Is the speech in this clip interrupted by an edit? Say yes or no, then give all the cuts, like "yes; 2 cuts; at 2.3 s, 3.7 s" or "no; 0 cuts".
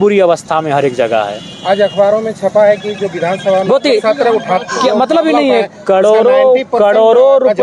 no; 0 cuts